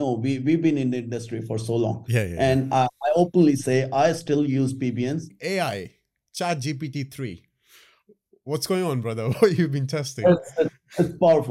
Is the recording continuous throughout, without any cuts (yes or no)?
no